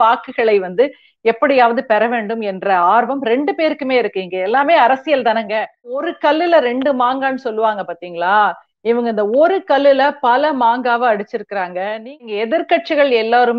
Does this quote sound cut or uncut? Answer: cut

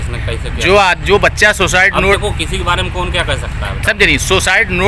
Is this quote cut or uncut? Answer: uncut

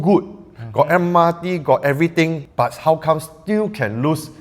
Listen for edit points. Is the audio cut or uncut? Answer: cut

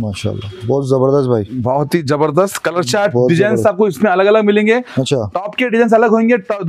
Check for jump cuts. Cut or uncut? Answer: uncut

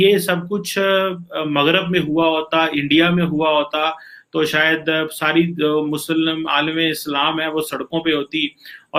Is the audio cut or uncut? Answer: uncut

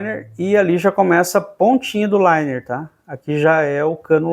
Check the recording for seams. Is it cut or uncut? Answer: uncut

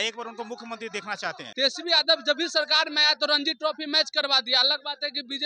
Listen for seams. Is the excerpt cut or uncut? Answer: cut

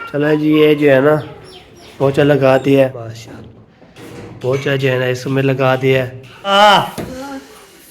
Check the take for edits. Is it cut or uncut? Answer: cut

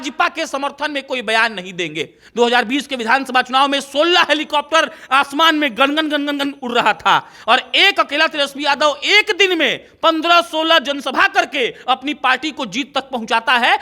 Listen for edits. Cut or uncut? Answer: cut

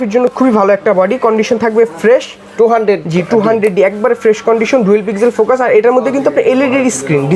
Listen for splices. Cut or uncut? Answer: uncut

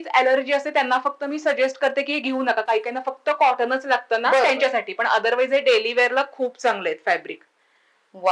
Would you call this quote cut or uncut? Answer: uncut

